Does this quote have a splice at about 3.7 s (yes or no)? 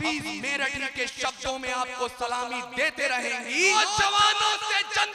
yes